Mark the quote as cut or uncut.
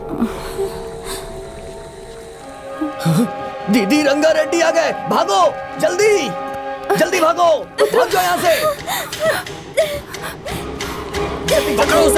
cut